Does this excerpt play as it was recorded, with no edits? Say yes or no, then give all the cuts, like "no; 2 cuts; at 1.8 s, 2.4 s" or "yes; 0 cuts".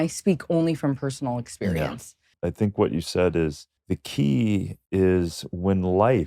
no; 3 cuts; at 2.3 s, 3.7 s, 4.8 s